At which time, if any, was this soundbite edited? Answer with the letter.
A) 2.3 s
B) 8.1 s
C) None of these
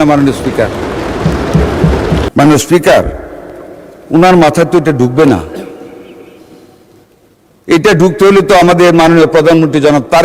A